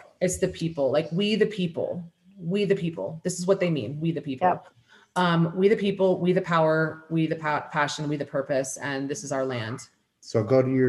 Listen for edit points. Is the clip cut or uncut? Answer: uncut